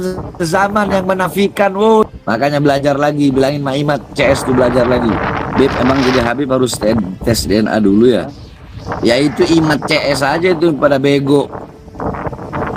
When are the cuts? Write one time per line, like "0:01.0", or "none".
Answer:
0:02.0